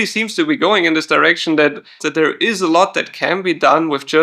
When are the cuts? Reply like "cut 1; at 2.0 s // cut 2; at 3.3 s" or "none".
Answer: cut 1; at 2.0 s

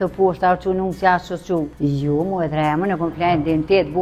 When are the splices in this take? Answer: cut 1; at 1.7 s

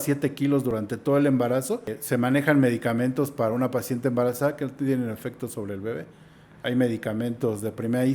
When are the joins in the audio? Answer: cut 1; at 1.9 s

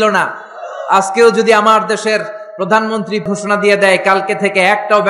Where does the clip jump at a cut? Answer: cut 1; at 3.3 s

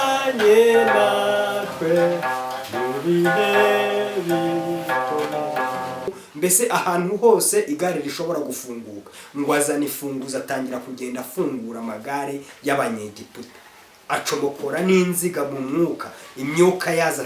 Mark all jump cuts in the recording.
cut 1; at 6.2 s

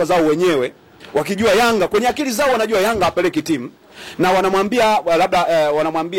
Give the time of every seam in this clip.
none

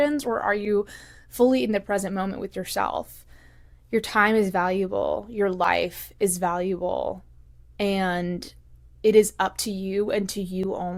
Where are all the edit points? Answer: none

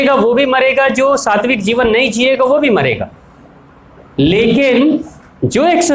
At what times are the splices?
none

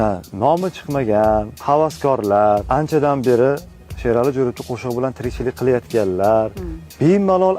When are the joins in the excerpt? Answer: cut 1; at 1.5 s // cut 2; at 2.6 s

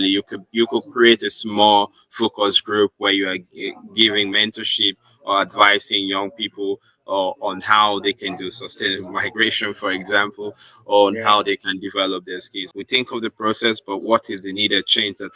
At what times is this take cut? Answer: cut 1; at 12.6 s

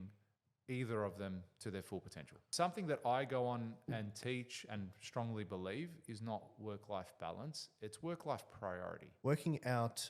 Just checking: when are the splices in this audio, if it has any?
cut 1; at 2.5 s // cut 2; at 9.1 s

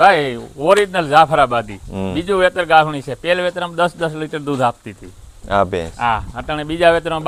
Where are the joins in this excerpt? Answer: none

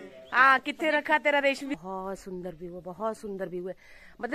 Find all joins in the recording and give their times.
cut 1; at 1.8 s

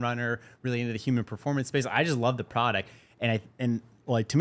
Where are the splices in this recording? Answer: none

